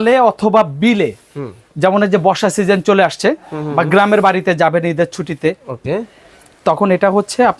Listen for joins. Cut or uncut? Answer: uncut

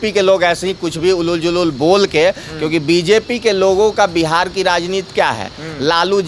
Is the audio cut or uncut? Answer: uncut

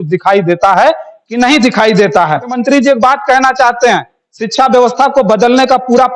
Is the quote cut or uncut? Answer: cut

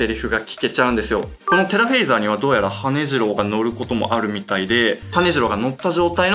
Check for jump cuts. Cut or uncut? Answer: uncut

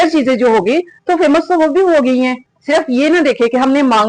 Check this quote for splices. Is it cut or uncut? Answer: cut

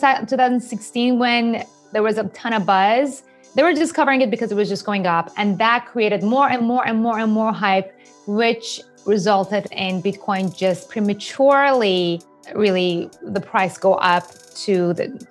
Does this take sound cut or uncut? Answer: cut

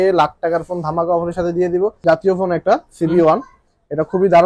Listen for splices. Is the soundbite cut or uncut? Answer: cut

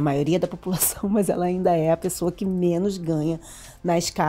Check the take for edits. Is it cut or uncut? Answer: uncut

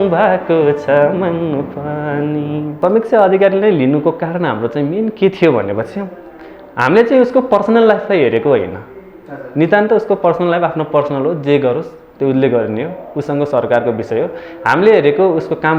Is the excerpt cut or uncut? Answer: cut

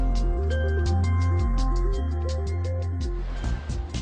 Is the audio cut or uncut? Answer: uncut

